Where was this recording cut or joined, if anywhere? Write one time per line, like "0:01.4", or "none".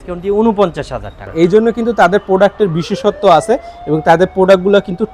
0:01.2